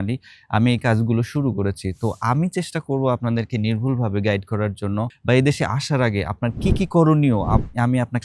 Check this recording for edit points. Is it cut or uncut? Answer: cut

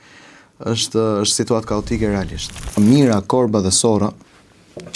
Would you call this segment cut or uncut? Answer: cut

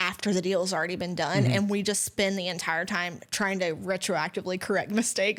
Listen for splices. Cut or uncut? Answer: uncut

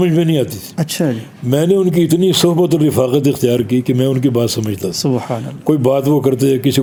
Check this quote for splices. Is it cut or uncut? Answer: uncut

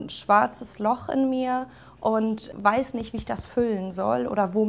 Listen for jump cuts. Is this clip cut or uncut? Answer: cut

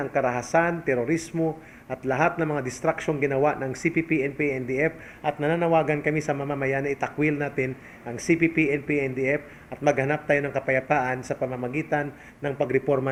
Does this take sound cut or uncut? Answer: uncut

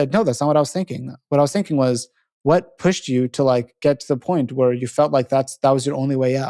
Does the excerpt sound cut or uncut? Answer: uncut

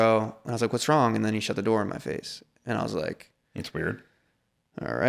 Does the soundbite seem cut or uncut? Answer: uncut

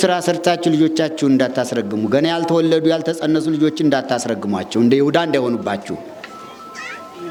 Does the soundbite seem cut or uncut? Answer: uncut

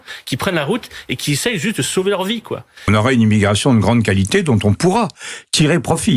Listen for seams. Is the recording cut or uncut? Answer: cut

